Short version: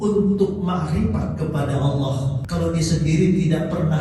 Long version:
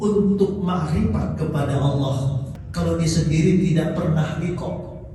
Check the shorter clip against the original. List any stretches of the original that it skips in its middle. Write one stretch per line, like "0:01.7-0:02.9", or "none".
0:02.3-0:02.6